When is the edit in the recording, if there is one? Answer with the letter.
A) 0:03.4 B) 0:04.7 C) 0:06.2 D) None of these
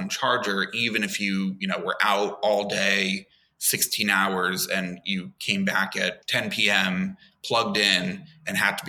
C